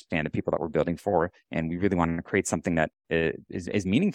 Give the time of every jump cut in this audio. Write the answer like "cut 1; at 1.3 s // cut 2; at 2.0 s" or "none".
none